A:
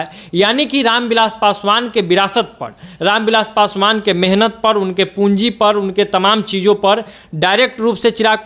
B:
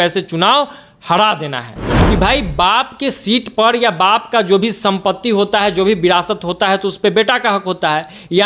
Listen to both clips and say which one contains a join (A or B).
B